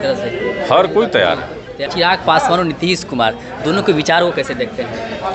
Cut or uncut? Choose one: cut